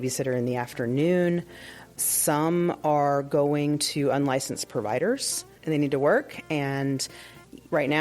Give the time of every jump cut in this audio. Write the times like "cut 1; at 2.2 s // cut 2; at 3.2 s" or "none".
cut 1; at 5.5 s